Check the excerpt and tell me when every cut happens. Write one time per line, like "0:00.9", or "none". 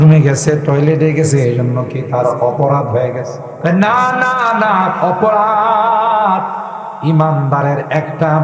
0:03.4